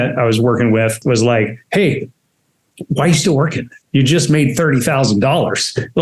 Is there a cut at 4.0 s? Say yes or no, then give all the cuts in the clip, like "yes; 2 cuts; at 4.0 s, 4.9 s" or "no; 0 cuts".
no; 1 cut; at 1.0 s